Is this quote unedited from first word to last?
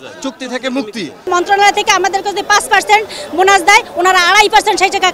no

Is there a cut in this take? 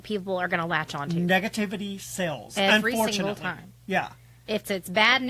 no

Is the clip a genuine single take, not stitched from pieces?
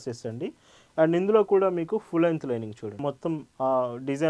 no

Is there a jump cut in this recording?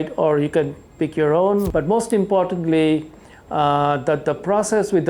yes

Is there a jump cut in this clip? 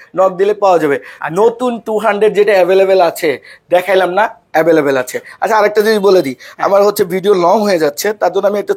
no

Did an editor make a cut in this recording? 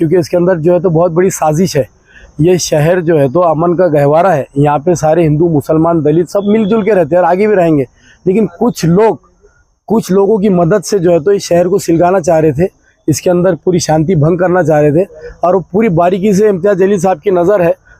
no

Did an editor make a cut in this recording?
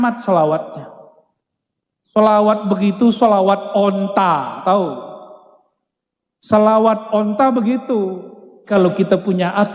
yes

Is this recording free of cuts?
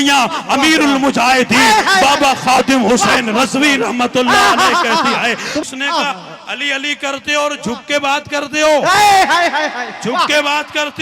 no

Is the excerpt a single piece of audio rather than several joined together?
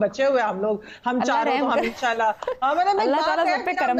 yes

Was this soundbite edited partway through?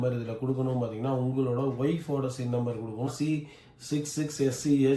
yes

